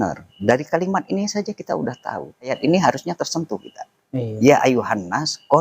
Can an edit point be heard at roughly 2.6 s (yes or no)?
yes